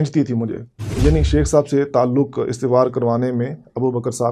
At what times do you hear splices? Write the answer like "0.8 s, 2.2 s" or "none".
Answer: 0.9 s